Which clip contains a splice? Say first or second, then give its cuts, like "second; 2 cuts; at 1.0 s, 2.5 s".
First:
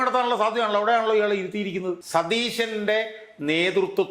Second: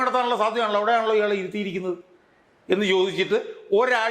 first; 1 cut; at 2.0 s